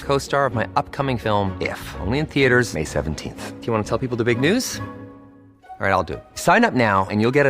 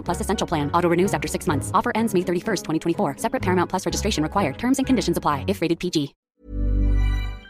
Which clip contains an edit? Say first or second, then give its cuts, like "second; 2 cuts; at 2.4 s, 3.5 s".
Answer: second; 1 cut; at 6.2 s